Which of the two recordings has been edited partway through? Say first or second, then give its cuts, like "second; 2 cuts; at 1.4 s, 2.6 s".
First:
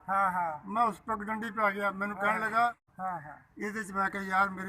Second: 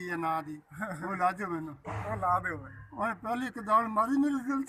first; 1 cut; at 2.9 s